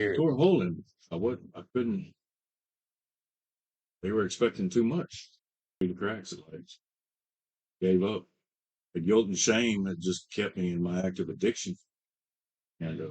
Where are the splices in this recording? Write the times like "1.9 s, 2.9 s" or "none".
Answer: 5.8 s